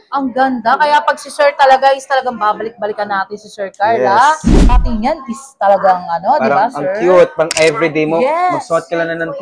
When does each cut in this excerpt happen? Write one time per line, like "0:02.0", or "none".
0:04.9